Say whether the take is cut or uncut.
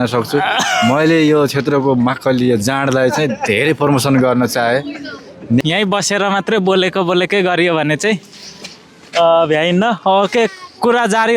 cut